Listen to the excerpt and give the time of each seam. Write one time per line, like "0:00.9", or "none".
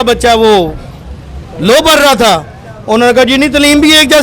none